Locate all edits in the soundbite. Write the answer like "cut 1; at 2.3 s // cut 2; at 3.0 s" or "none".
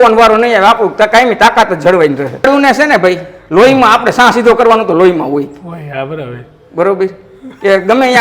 cut 1; at 2.5 s